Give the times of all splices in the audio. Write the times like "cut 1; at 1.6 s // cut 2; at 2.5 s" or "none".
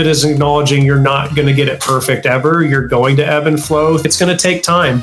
cut 1; at 4.0 s